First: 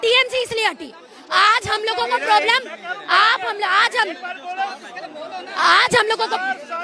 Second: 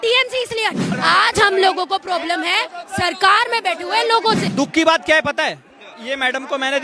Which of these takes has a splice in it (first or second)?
second